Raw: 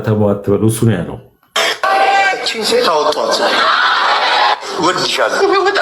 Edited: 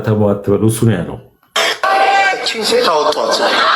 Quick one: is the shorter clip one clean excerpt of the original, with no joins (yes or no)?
yes